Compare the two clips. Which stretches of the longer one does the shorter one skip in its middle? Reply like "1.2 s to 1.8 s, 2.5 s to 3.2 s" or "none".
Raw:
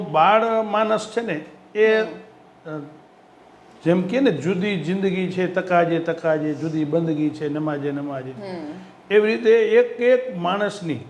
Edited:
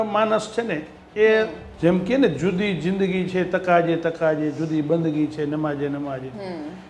2.2 s to 3.7 s